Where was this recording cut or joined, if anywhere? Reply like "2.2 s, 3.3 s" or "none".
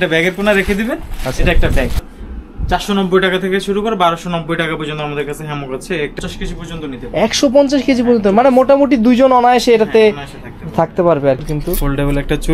2.0 s, 6.2 s, 11.5 s